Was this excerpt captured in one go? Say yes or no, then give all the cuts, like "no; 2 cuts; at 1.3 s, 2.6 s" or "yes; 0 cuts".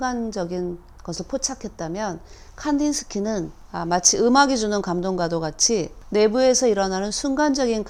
yes; 0 cuts